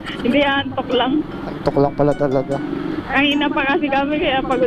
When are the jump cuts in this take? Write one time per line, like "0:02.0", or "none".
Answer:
0:01.4